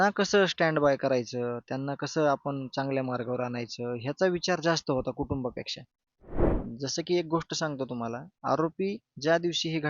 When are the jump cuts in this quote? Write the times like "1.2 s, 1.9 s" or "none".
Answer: 6.5 s